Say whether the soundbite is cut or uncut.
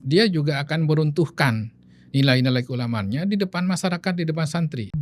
uncut